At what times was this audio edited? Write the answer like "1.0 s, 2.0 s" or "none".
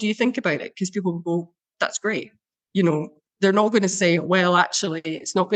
none